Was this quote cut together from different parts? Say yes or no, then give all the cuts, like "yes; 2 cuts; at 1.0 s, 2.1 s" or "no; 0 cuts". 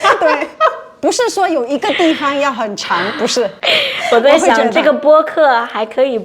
yes; 2 cuts; at 0.9 s, 3.6 s